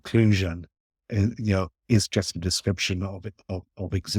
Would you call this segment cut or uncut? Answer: uncut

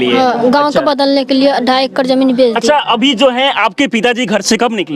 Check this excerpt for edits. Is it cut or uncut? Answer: uncut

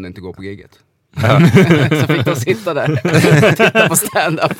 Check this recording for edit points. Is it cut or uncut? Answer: uncut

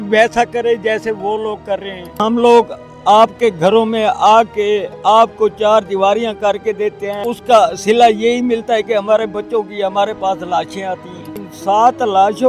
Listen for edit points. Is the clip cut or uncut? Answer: cut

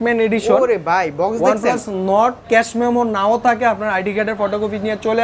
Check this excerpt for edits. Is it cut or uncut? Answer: cut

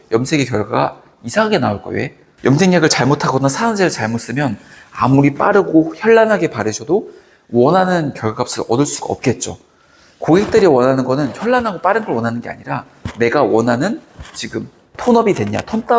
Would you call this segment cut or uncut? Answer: cut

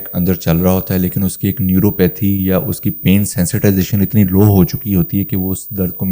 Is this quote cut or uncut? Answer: uncut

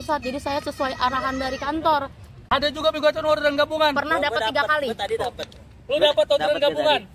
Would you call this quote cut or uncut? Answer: cut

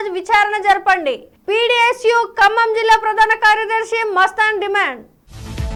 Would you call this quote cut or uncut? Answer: uncut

